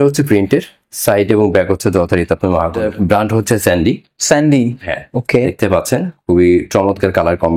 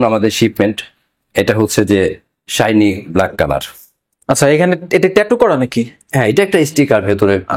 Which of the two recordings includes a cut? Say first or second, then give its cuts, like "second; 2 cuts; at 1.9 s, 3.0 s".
first; 1 cut; at 2.8 s